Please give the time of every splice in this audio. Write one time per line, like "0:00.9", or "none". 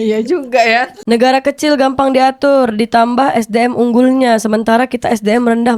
0:01.0

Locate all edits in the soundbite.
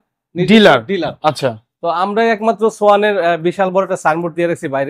none

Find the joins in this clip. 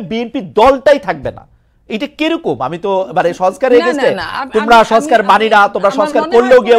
none

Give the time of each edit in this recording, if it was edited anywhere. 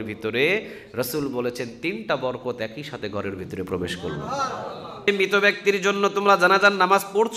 0:05.1

